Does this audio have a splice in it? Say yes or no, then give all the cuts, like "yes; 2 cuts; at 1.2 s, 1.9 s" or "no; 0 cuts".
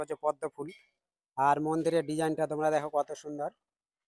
no; 0 cuts